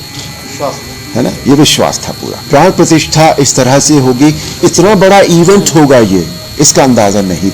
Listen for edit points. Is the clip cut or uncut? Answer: cut